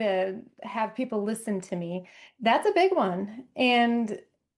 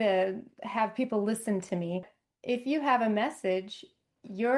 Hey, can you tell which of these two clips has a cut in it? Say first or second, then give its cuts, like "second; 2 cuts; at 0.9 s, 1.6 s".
second; 1 cut; at 2.2 s